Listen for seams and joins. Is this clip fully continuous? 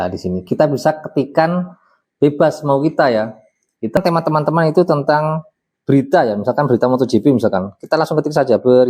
no; 1 cut; at 4.0 s

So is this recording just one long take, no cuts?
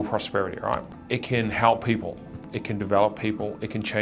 no; 2 cuts; at 0.9 s, 2.5 s

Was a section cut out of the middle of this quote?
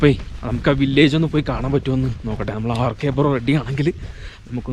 no; 0 cuts

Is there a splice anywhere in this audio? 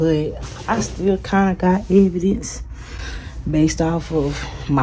no; 0 cuts

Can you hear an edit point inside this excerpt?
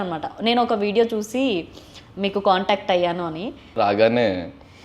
yes; 1 cut; at 3.8 s

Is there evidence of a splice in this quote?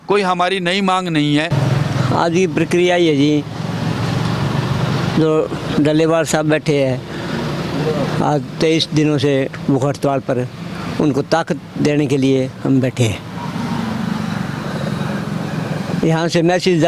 no; 0 cuts

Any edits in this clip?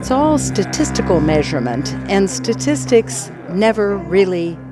no; 0 cuts

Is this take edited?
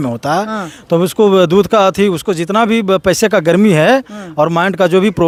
no; 0 cuts

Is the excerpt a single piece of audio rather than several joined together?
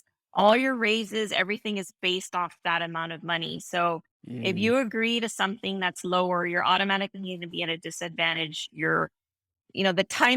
yes; 0 cuts

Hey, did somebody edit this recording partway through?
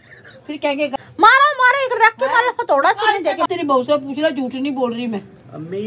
yes; 2 cuts; at 0.9 s, 3.5 s

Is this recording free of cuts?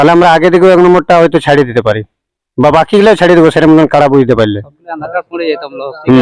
yes; 0 cuts

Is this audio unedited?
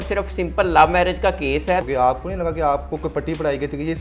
no; 1 cut; at 1.8 s

